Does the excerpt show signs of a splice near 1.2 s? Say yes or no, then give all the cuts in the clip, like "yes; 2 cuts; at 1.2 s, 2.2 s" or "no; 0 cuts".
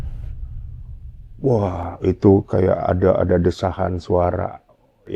yes; 1 cut; at 1.2 s